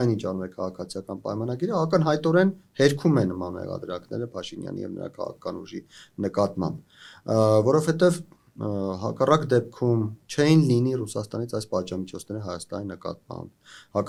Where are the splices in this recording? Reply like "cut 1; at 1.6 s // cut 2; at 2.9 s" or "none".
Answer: none